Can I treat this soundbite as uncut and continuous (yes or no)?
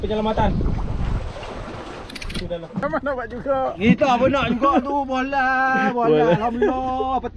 no